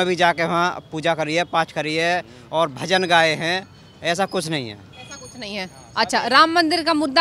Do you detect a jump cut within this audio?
no; 0 cuts

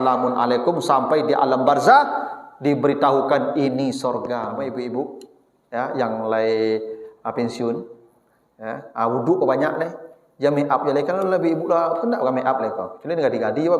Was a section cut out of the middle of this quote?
yes; 1 cut; at 4.9 s

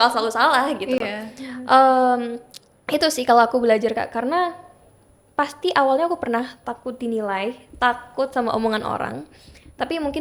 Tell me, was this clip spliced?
no; 0 cuts

